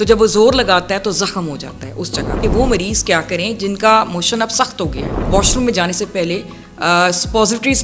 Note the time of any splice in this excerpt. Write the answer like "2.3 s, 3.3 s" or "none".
2.4 s, 5.2 s